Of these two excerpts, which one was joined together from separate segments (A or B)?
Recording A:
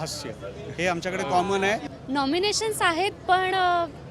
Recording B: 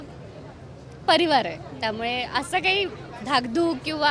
A